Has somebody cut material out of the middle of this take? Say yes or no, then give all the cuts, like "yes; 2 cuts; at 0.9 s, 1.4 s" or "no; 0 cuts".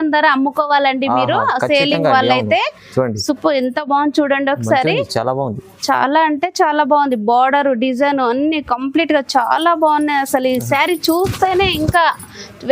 no; 0 cuts